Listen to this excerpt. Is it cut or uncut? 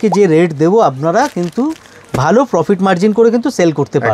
uncut